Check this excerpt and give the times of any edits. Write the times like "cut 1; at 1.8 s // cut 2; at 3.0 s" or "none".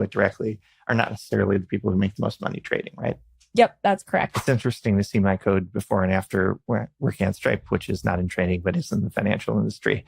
cut 1; at 4.3 s